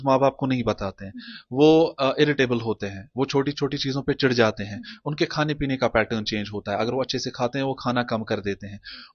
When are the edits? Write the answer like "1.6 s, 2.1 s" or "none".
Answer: none